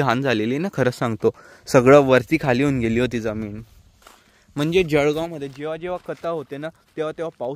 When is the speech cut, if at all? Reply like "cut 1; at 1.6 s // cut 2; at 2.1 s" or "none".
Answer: none